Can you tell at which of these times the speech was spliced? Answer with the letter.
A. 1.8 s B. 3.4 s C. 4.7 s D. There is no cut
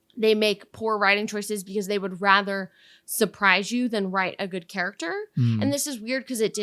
D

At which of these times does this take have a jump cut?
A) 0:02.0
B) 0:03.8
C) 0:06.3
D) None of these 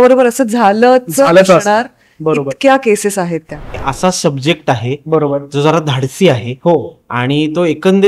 B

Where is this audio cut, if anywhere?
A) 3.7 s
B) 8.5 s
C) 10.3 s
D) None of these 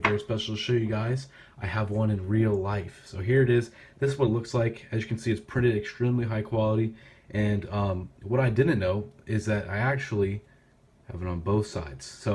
B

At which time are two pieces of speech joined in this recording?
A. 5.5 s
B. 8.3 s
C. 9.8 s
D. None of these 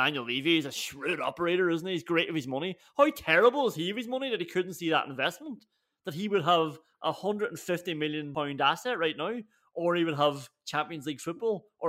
B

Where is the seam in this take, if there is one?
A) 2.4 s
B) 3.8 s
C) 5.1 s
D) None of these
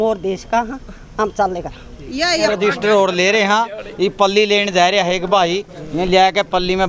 A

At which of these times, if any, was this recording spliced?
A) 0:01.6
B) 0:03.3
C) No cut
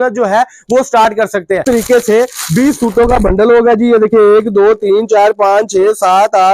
A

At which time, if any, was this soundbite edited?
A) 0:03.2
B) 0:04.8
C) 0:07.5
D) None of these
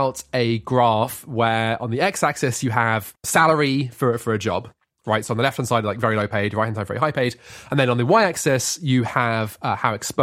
A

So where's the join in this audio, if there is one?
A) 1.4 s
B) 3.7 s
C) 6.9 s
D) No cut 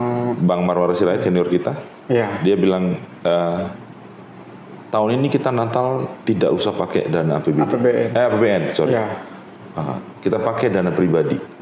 D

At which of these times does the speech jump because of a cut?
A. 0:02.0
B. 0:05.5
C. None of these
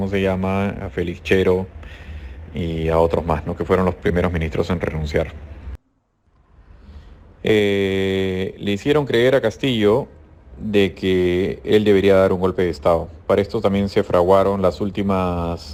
C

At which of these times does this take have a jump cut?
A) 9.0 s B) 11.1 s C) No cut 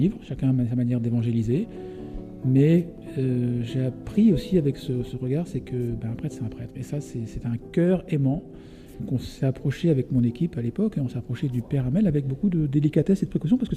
A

